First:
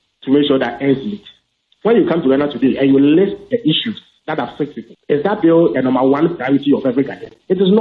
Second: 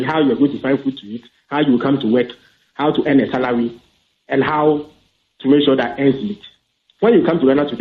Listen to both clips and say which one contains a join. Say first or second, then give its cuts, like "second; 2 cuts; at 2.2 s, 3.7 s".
first; 1 cut; at 4.9 s